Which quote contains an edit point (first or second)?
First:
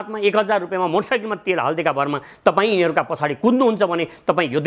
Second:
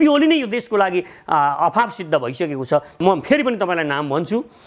second